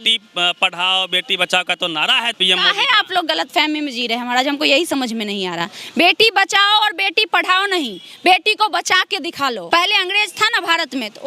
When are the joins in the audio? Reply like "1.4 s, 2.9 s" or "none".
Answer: 2.4 s, 9.6 s